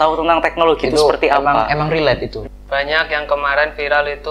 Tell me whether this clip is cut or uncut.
cut